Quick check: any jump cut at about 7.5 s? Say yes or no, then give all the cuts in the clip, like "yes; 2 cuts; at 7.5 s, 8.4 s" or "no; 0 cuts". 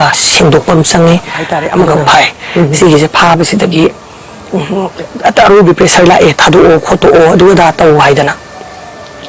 no; 1 cut; at 1.9 s